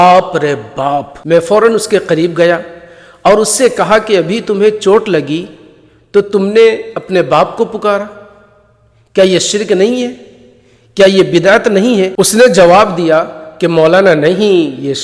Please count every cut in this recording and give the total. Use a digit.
1